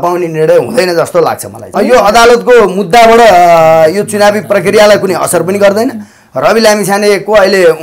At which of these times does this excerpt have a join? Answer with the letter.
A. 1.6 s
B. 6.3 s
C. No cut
A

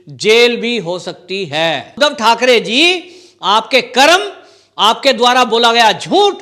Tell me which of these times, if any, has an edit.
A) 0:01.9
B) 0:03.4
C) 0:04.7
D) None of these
A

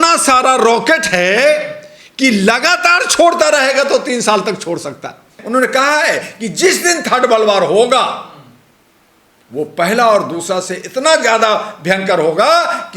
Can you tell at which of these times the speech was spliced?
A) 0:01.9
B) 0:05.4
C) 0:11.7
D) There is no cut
B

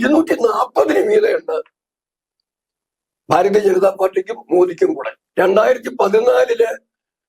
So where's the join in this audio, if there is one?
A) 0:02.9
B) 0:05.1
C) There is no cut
B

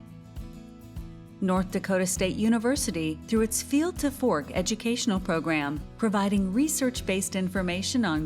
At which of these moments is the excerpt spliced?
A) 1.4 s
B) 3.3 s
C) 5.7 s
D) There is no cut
A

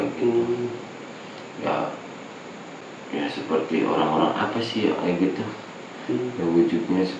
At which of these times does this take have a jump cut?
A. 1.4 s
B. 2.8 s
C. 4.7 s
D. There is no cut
B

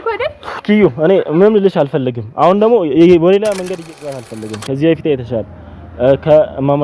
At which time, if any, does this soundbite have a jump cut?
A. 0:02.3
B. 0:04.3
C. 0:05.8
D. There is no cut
B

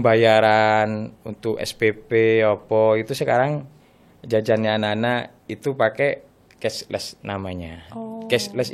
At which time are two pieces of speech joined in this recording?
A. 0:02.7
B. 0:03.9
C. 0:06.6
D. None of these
D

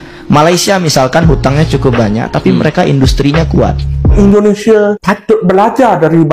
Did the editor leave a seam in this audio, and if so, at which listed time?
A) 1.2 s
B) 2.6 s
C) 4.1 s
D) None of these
C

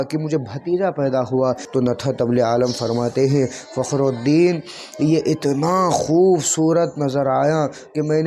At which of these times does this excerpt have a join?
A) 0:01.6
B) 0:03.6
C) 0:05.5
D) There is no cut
A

